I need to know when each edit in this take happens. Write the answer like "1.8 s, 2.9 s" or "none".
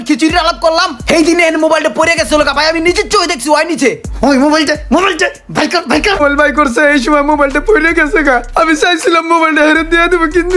6.2 s